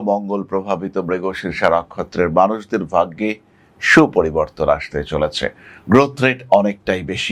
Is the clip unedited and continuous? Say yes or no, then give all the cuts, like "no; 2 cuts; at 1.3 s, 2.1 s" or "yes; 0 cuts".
yes; 0 cuts